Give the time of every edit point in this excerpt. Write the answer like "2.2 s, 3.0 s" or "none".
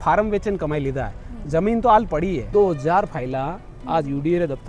2.5 s